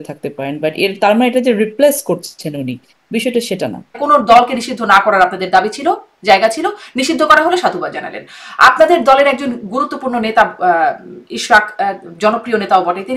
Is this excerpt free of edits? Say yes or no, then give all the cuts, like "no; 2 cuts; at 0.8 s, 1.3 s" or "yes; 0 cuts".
no; 1 cut; at 4.0 s